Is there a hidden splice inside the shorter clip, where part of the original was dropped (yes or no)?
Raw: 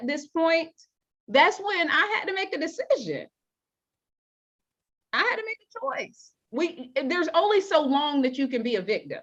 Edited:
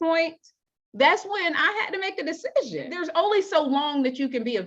yes